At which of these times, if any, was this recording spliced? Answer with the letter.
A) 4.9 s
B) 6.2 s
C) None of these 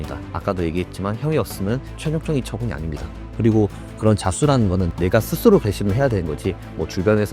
A